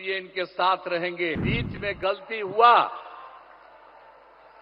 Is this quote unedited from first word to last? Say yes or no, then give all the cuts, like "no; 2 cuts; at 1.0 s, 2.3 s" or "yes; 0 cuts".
no; 1 cut; at 1.4 s